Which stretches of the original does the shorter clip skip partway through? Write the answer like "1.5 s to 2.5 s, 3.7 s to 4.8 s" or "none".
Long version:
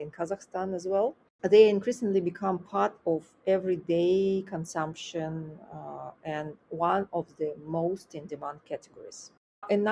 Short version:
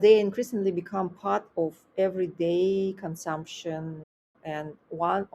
5.8 s to 6.1 s